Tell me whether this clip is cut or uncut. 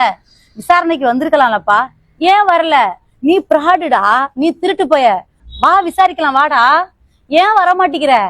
cut